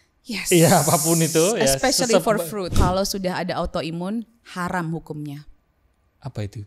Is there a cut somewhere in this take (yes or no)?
yes